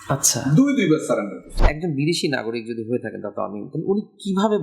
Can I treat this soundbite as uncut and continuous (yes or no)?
no